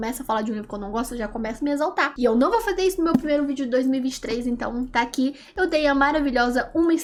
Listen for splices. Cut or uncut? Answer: uncut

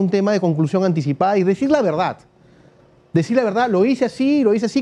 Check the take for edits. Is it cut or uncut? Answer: uncut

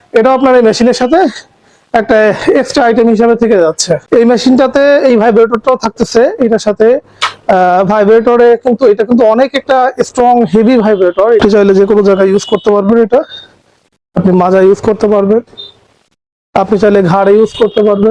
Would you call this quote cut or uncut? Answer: cut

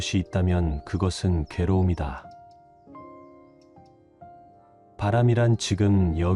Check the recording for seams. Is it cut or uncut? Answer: uncut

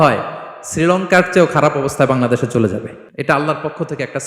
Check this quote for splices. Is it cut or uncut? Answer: cut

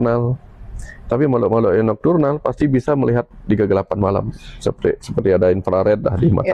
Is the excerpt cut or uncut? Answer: uncut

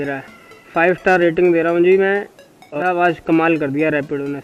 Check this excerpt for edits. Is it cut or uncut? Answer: cut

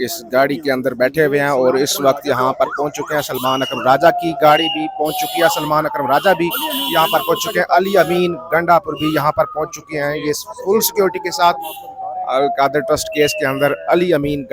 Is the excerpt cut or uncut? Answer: uncut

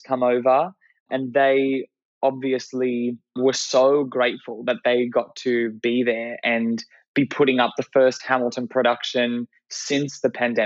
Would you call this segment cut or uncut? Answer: cut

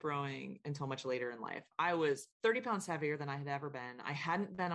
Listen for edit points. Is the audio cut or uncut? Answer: cut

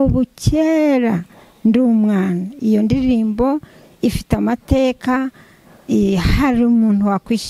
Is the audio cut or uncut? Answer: uncut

